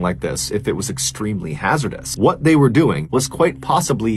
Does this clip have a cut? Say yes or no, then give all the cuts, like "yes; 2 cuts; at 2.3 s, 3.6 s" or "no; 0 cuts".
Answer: yes; 1 cut; at 2.0 s